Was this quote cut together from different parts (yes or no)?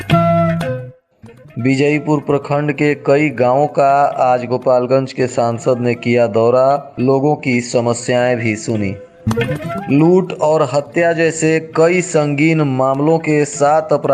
yes